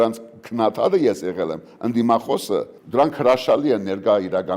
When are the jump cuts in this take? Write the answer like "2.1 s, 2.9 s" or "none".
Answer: 2.8 s